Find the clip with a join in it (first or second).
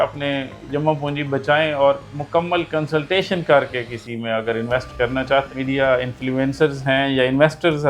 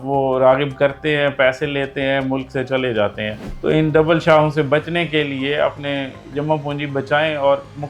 first